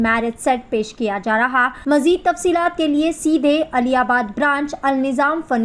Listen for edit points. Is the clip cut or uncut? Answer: cut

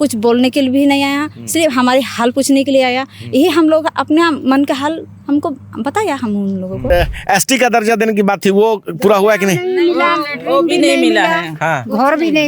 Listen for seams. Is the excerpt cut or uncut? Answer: cut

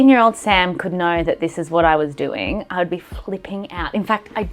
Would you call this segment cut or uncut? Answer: uncut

